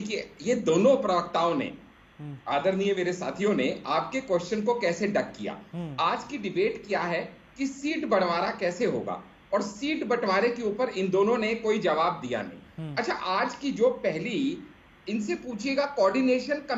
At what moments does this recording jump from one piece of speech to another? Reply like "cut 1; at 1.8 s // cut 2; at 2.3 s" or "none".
none